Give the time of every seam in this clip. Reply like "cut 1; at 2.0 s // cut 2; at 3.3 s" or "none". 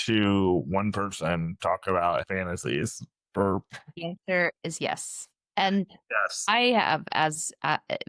cut 1; at 2.2 s